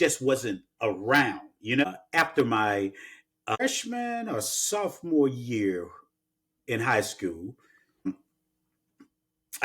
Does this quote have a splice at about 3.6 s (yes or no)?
yes